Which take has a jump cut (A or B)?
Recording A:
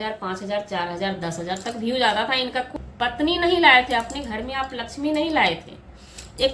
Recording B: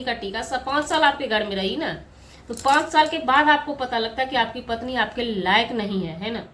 A